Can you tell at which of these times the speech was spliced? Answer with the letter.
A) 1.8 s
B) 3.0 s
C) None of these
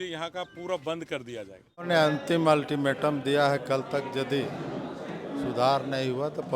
A